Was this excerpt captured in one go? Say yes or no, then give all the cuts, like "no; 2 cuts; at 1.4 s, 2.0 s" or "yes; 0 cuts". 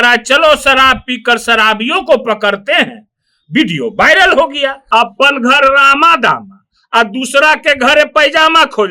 no; 1 cut; at 4.8 s